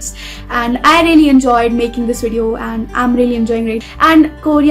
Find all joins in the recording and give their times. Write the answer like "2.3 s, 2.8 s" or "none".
3.8 s